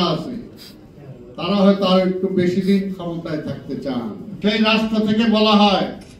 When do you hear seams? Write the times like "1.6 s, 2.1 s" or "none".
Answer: 4.2 s